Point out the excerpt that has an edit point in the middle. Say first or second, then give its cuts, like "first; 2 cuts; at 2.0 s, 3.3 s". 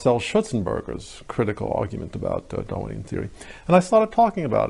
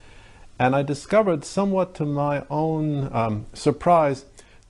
first; 1 cut; at 2.7 s